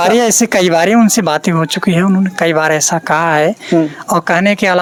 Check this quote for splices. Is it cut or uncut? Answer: uncut